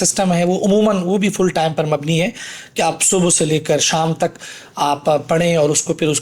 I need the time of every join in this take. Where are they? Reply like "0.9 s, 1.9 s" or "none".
none